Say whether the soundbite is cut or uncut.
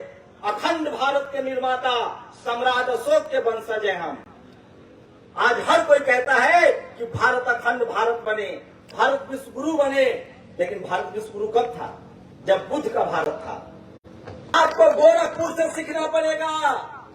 cut